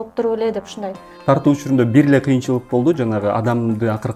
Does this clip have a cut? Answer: yes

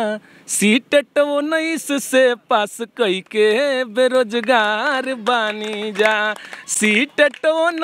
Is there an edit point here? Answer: no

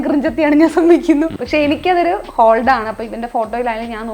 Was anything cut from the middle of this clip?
yes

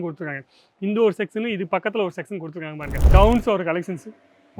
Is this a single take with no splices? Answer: no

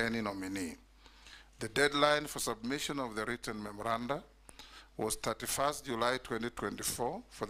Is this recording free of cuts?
yes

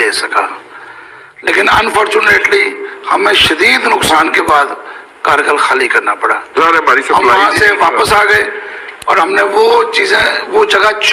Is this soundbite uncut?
yes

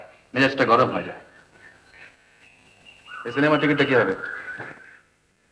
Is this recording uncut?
yes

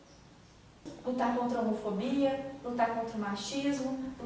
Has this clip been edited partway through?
yes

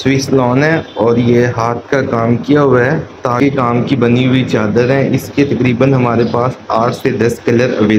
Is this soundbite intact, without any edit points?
no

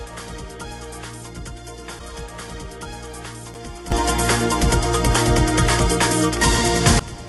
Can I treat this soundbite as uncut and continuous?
yes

